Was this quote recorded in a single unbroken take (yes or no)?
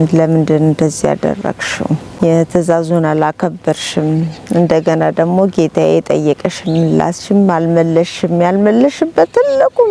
no